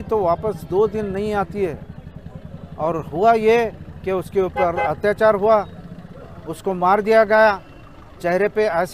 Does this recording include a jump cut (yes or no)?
no